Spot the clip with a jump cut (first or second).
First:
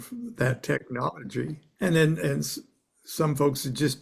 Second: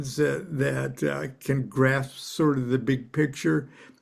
first